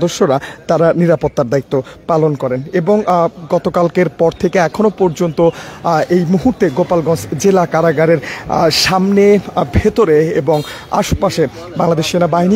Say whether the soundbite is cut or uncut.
uncut